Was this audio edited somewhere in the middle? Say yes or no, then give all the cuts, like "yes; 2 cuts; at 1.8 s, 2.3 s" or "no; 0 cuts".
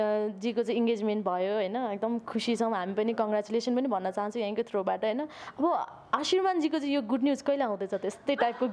no; 0 cuts